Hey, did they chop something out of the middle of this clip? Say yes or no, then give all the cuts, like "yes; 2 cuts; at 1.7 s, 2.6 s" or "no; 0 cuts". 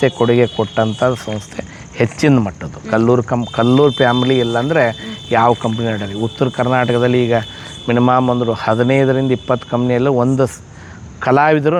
no; 0 cuts